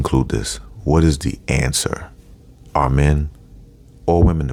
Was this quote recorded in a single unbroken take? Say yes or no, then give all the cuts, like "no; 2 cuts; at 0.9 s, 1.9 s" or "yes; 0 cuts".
yes; 0 cuts